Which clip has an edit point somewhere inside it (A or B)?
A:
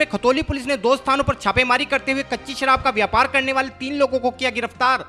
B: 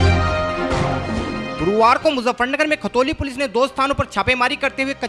B